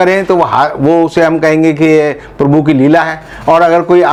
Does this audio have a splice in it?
no; 0 cuts

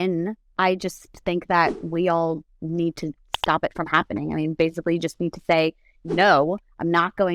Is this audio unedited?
yes; 0 cuts

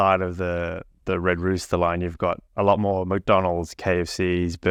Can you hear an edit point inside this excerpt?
no; 0 cuts

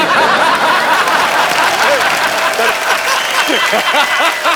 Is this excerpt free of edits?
yes; 0 cuts

